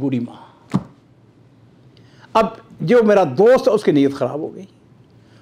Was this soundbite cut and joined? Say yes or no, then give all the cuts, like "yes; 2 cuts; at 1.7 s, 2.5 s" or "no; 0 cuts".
no; 0 cuts